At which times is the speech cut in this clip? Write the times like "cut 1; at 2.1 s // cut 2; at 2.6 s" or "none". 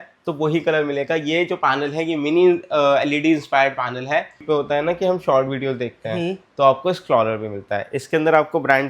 cut 1; at 4.4 s